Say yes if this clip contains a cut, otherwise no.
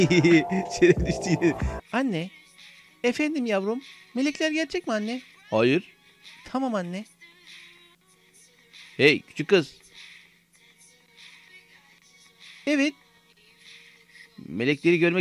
yes